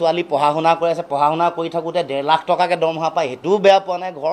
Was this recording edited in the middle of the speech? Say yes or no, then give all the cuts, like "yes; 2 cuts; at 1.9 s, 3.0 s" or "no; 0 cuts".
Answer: no; 0 cuts